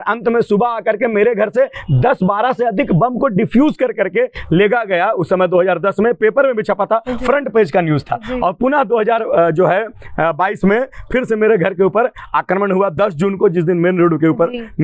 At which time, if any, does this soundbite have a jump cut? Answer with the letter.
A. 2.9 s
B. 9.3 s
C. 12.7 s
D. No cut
D